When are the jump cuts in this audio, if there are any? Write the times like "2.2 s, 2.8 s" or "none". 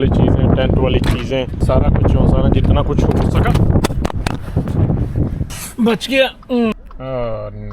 1.6 s, 5.6 s, 6.7 s